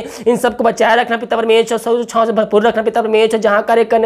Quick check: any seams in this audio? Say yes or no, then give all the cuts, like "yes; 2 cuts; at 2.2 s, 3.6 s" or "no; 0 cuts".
no; 0 cuts